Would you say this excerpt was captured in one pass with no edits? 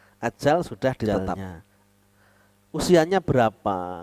no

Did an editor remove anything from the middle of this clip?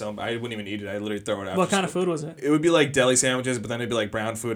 no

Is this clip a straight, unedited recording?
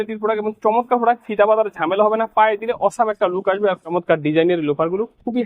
no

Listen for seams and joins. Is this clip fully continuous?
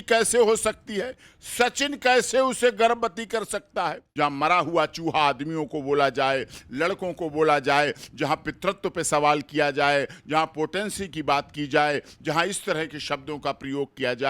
no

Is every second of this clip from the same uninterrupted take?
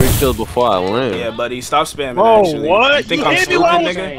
yes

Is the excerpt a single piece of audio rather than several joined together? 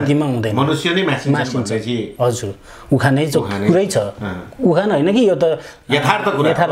yes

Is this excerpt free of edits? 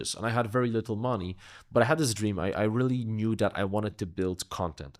yes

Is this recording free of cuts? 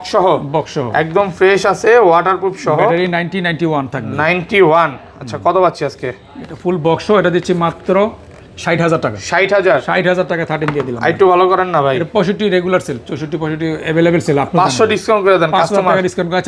yes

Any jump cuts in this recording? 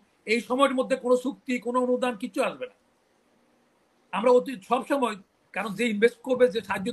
no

